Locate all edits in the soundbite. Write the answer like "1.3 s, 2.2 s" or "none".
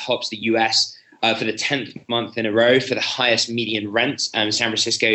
none